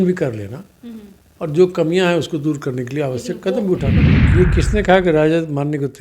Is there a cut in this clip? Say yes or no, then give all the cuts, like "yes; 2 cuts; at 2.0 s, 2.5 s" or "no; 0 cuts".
yes; 1 cut; at 4.1 s